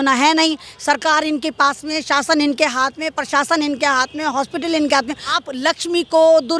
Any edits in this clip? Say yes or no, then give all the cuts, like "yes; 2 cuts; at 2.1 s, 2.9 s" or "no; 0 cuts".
yes; 1 cut; at 5.4 s